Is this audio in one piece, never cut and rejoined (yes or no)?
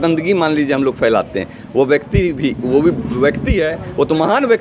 yes